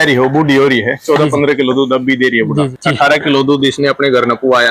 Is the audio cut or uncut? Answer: cut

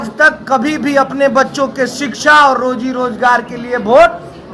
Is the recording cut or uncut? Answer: uncut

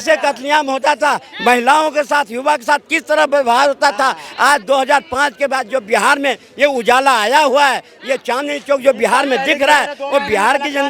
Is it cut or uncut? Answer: uncut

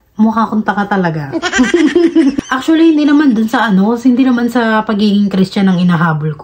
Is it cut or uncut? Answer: cut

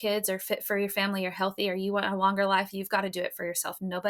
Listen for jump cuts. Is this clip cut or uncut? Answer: uncut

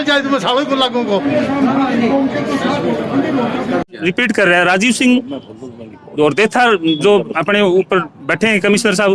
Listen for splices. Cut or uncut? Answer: cut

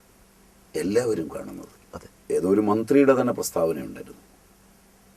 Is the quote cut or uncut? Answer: cut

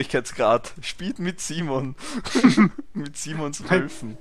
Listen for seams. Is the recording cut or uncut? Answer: uncut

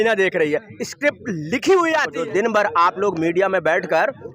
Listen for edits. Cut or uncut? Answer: cut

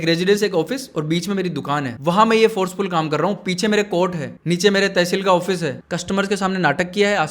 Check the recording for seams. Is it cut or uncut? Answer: cut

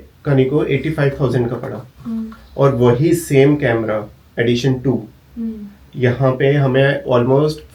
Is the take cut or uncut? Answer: uncut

